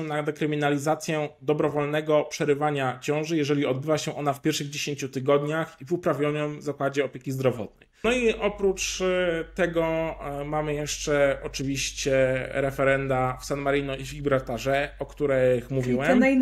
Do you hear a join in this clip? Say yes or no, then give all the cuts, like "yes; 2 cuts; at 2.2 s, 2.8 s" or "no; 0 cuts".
yes; 1 cut; at 7.8 s